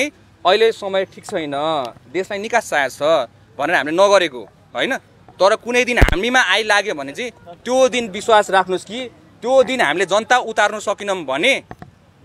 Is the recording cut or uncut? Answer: uncut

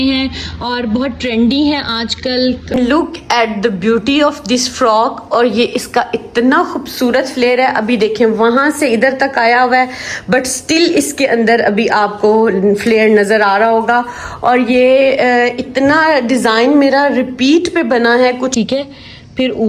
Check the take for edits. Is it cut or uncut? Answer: cut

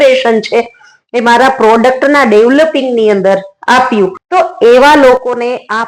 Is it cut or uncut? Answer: cut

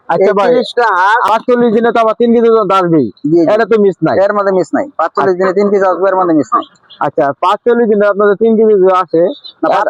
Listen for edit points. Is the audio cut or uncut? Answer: cut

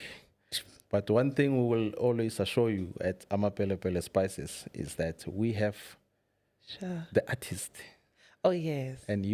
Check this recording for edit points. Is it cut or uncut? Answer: uncut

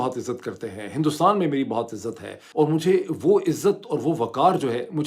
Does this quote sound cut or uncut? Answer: cut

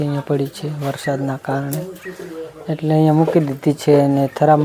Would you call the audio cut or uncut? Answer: uncut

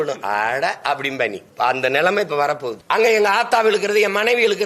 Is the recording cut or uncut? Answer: cut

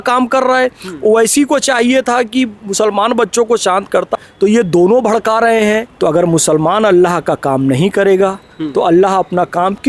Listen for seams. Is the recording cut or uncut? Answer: cut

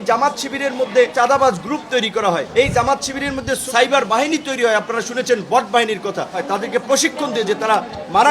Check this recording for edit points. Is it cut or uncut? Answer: cut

